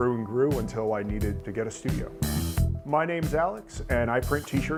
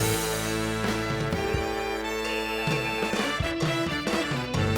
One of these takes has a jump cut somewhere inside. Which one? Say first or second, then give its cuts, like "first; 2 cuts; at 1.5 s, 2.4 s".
second; 1 cut; at 3.1 s